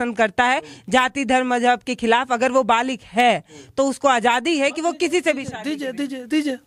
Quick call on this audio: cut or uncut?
uncut